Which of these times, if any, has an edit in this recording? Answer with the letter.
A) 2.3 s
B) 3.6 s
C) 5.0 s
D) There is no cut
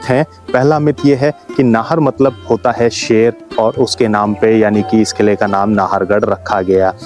D